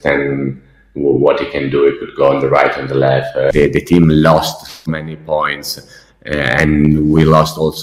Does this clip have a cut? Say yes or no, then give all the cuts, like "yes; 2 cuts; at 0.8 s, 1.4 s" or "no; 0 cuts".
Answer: yes; 1 cut; at 3.5 s